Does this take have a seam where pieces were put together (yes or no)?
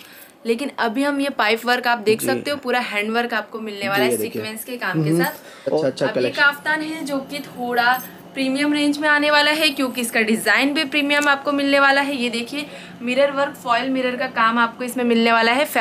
yes